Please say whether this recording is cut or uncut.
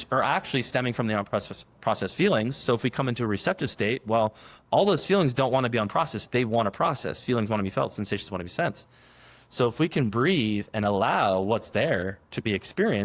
uncut